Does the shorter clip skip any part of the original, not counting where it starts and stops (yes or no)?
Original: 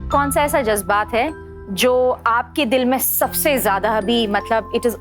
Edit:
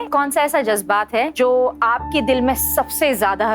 yes